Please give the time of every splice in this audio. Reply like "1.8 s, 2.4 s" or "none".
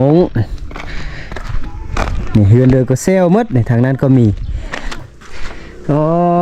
5.0 s